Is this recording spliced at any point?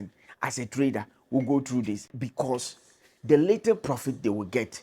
yes; 1 cut; at 2.2 s

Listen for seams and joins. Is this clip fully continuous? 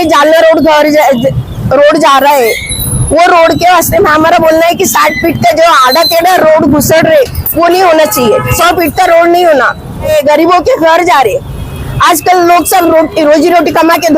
no; 2 cuts; at 8.5 s, 10.1 s

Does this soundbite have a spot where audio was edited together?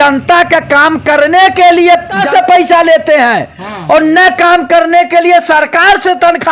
yes; 1 cut; at 2.2 s

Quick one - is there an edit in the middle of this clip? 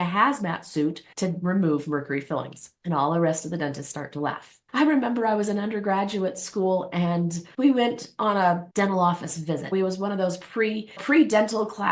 yes; 1 cut; at 4.6 s

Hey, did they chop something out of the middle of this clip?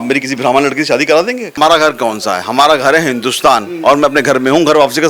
yes; 1 cut; at 1.5 s

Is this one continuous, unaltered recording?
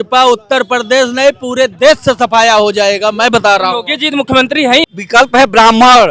no; 1 cut; at 4.8 s

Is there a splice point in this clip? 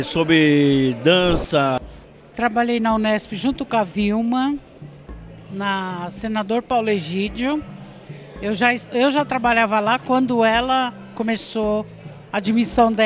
yes; 1 cut; at 1.8 s

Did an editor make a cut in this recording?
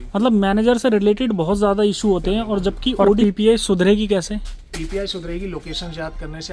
yes; 1 cut; at 3.2 s

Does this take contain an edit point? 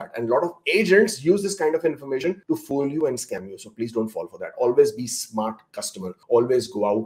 no; 0 cuts

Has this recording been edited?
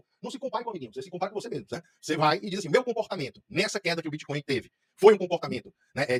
no; 0 cuts

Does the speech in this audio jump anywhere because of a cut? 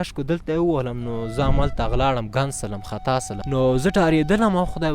yes; 1 cut; at 3.4 s

